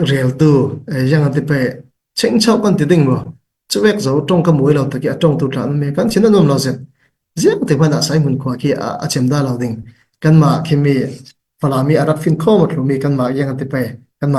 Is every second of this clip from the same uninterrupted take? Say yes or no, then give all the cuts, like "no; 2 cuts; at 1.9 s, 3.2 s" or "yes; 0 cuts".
yes; 0 cuts